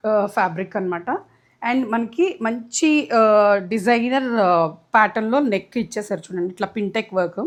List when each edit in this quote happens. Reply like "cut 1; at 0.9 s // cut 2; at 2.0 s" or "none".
none